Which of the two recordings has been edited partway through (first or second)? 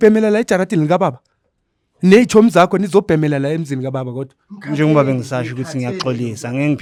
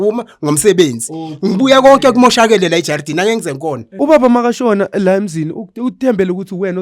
second